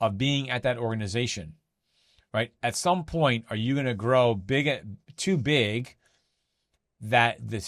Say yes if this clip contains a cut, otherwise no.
no